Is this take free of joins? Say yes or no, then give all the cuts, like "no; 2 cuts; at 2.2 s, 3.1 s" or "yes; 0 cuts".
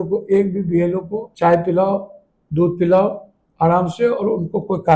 no; 1 cut; at 1.2 s